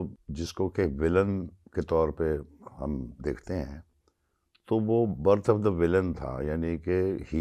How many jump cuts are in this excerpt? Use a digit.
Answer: 0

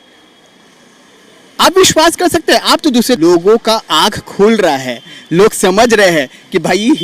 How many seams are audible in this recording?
1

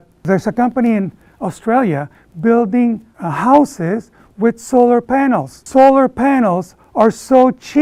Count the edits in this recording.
0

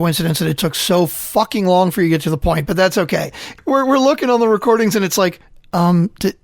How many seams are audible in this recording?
1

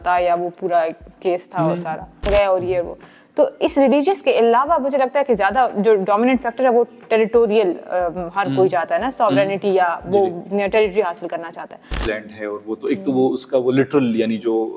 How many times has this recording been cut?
2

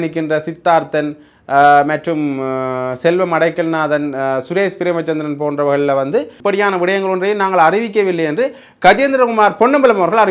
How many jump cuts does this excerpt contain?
1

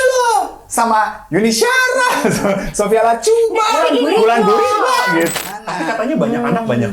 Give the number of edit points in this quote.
1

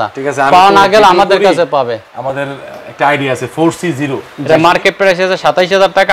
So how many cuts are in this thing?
1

